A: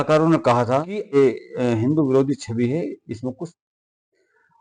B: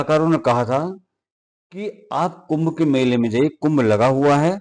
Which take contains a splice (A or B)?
A